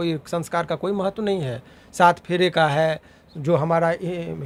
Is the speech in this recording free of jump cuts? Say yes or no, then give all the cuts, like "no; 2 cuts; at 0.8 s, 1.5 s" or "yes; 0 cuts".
yes; 0 cuts